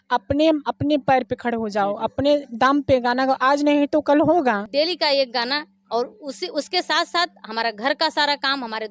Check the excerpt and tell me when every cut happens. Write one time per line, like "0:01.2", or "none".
0:04.6